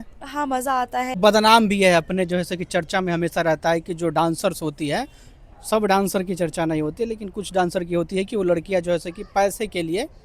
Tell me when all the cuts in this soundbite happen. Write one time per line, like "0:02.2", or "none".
0:01.2